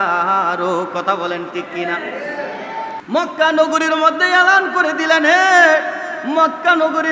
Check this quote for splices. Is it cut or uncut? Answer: cut